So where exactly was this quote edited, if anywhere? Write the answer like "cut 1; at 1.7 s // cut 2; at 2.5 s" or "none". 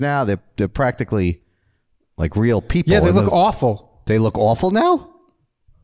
none